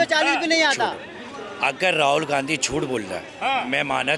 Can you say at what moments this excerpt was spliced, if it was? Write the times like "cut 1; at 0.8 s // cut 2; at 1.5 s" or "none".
none